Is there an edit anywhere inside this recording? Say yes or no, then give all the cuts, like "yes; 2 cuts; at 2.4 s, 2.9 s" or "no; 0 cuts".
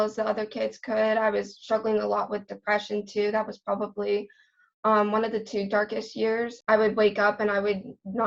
no; 0 cuts